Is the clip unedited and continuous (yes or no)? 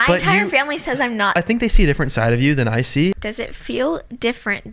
no